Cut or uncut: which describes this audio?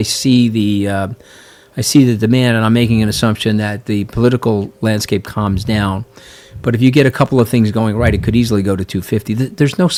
uncut